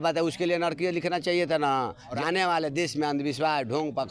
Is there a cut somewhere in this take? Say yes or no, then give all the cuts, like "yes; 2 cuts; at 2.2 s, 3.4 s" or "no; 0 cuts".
yes; 1 cut; at 2.2 s